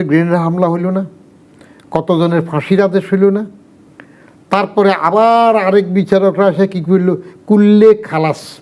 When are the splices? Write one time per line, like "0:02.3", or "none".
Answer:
none